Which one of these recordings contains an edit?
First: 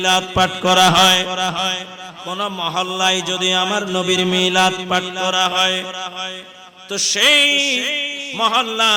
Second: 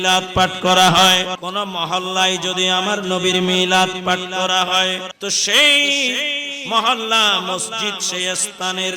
second; 2 cuts; at 1.3 s, 5.1 s

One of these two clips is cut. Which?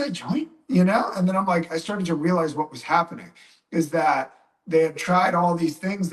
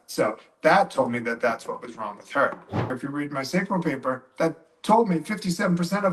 second; 1 cut; at 2.9 s

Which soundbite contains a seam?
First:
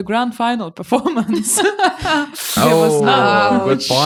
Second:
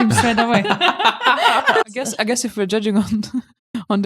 second; 1 cut; at 1.8 s

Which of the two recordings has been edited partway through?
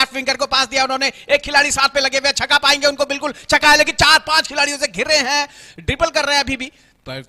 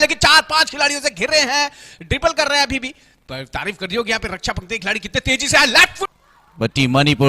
second; 1 cut; at 6.1 s

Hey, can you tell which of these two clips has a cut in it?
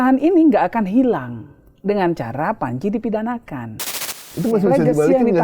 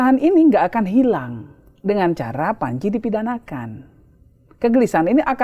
first; 1 cut; at 4.3 s

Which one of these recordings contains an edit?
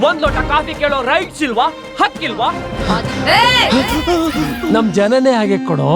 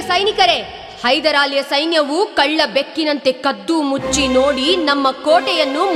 first; 2 cuts; at 2.7 s, 4.6 s

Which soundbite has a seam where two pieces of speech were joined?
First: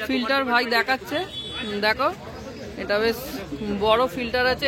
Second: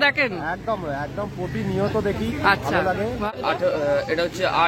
second; 1 cut; at 3.3 s

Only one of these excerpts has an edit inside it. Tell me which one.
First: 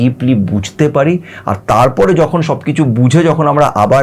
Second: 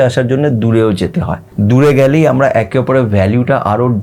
second; 1 cut; at 1.4 s

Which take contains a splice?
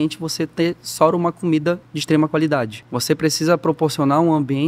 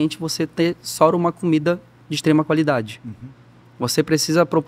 first; 2 cuts; at 1.9 s, 2.8 s

